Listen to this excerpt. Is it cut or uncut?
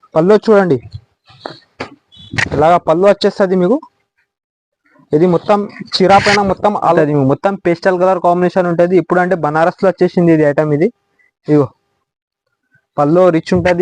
cut